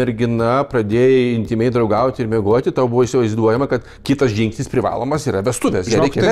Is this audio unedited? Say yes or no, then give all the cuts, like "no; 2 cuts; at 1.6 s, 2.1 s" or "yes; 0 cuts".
yes; 0 cuts